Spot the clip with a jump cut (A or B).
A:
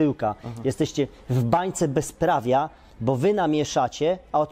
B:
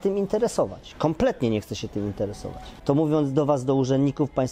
B